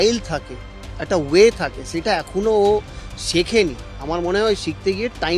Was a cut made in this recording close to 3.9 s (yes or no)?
yes